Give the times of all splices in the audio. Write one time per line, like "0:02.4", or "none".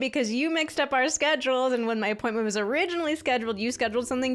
none